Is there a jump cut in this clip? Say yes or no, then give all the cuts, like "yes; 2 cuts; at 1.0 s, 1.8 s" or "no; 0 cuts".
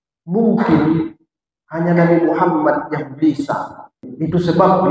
yes; 1 cut; at 4.0 s